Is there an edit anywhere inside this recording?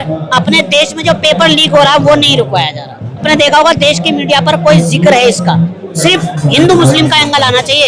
yes; 1 cut; at 3.2 s

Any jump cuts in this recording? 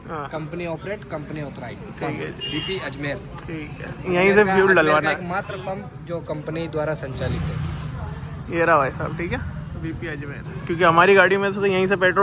no; 0 cuts

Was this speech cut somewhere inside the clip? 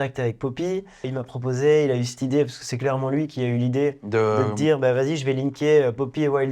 yes; 1 cut; at 1.1 s

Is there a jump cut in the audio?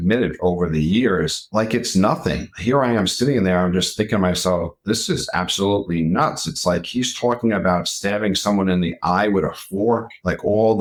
no; 0 cuts

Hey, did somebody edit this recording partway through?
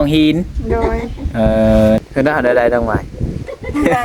yes; 1 cut; at 2.0 s

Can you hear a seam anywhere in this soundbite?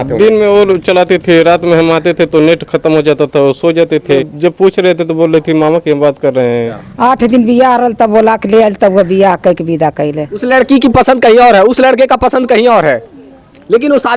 yes; 3 cuts; at 4.2 s, 6.8 s, 10.3 s

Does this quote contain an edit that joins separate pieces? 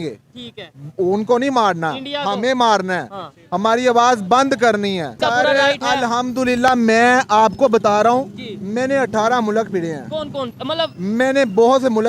yes; 1 cut; at 5.1 s

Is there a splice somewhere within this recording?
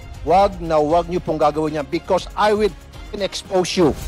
no; 0 cuts

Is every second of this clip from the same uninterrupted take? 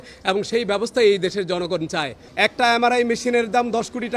no; 1 cut; at 2.2 s

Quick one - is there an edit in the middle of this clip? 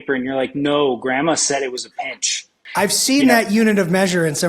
yes; 1 cut; at 2.6 s

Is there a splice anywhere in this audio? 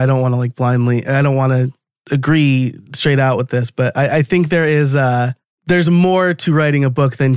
no; 0 cuts

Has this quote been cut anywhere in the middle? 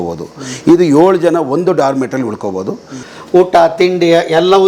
yes; 1 cut; at 3.0 s

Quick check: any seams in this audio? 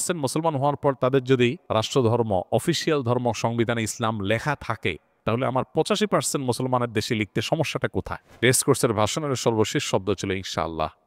yes; 3 cuts; at 1.6 s, 5.1 s, 8.2 s

